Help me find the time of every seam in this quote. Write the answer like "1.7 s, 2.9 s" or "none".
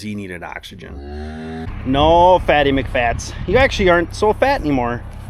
1.7 s